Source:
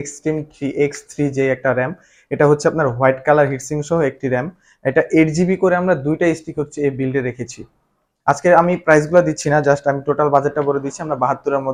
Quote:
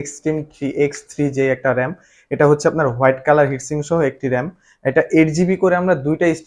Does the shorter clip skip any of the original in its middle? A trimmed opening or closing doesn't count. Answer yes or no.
no